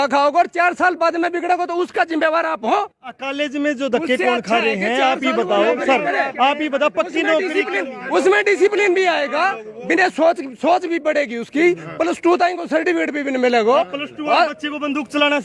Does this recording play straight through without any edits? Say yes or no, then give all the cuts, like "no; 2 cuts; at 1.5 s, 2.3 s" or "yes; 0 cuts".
yes; 0 cuts